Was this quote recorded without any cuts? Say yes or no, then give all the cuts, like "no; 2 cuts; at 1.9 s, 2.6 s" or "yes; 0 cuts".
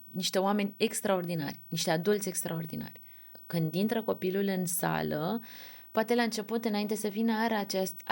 no; 1 cut; at 3.4 s